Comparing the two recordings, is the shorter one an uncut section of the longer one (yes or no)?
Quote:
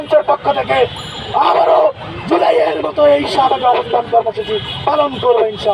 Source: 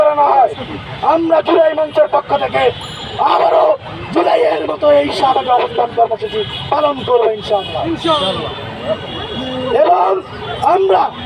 yes